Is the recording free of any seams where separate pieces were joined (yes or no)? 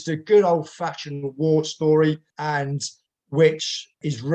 yes